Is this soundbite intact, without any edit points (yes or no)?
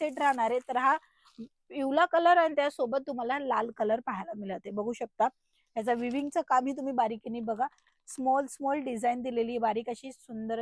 yes